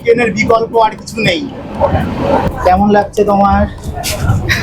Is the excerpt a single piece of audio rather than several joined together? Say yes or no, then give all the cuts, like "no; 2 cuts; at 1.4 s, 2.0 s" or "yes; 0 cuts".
no; 1 cut; at 2.5 s